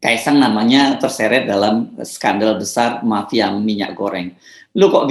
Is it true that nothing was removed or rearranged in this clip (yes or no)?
yes